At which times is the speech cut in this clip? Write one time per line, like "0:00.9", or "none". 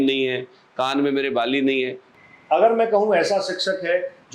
0:02.1